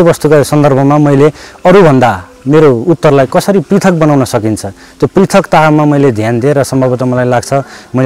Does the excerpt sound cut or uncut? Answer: uncut